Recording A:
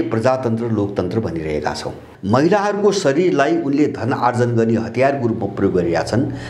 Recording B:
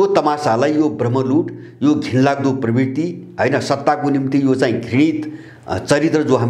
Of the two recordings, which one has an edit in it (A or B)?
A